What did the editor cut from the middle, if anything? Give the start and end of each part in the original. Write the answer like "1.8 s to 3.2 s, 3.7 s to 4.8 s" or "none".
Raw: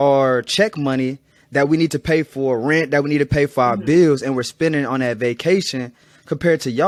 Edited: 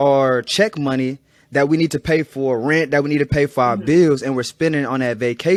none